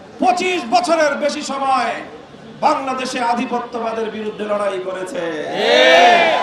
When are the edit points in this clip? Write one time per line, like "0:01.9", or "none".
none